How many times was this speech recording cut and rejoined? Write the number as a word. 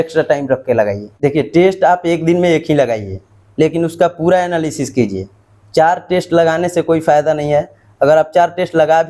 one